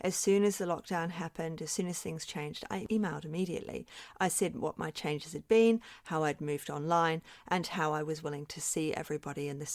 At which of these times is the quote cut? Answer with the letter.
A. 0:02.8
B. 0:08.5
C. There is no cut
A